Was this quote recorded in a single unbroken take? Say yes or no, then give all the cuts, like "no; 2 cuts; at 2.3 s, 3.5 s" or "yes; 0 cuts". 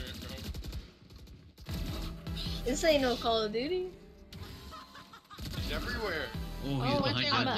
yes; 0 cuts